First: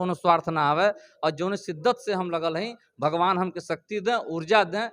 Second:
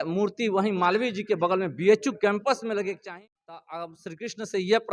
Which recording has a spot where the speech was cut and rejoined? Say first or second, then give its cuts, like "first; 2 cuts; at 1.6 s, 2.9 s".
second; 1 cut; at 3.0 s